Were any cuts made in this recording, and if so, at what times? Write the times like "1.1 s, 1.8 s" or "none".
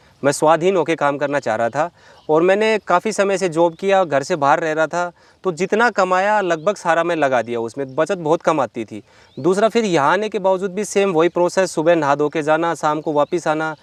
none